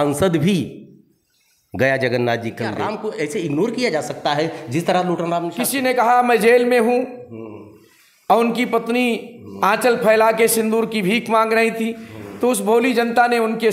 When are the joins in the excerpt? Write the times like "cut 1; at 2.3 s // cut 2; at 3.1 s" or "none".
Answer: cut 1; at 2.9 s // cut 2; at 5.6 s